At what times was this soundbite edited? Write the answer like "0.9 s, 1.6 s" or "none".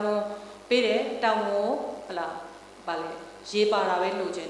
none